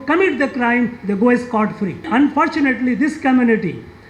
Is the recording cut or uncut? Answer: cut